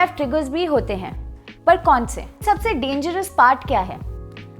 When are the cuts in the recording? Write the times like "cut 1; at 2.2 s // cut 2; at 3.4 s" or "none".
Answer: cut 1; at 2.4 s